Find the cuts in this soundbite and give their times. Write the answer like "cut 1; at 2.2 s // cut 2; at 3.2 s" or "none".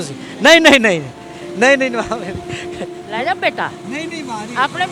none

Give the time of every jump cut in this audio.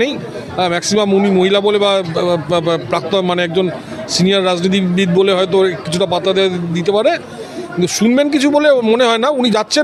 none

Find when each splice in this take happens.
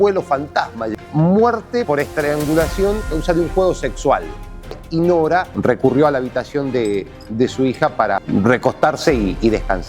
cut 1; at 0.9 s // cut 2; at 4.8 s

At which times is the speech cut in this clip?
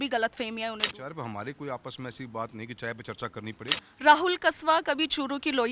cut 1; at 1.0 s // cut 2; at 3.9 s

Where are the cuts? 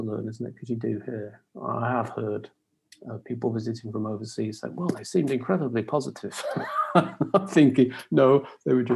none

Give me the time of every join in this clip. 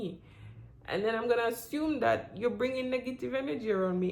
none

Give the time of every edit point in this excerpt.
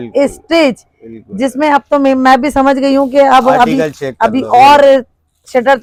none

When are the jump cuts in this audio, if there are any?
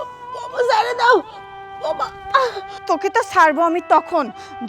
cut 1; at 2.7 s

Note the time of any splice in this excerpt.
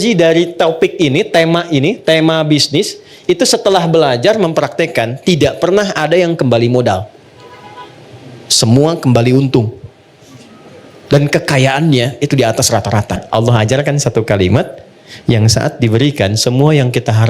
cut 1; at 13.2 s

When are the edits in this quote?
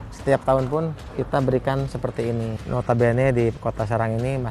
cut 1; at 2.6 s

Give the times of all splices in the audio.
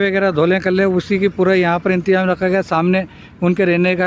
none

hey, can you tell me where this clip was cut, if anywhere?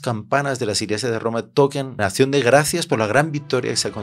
cut 1; at 2.0 s

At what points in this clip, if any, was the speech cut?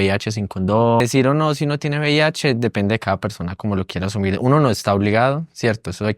cut 1; at 1.0 s

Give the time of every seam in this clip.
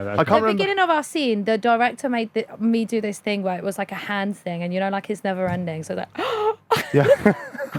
none

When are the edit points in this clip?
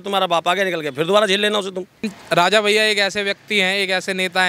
cut 1; at 2.1 s

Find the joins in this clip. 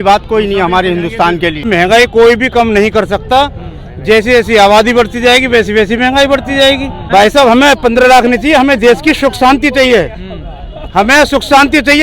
cut 1; at 1.7 s // cut 2; at 7.0 s

